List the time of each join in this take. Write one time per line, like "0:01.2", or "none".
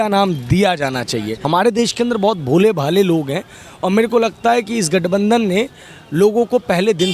0:01.4